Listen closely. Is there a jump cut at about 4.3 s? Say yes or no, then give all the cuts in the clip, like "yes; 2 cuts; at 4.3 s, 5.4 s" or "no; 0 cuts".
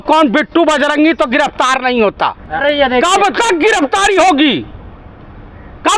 no; 1 cut; at 2.6 s